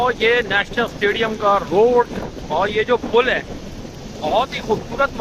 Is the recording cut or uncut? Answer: uncut